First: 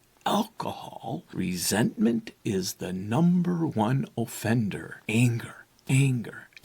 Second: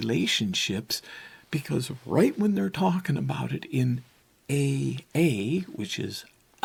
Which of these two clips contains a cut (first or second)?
first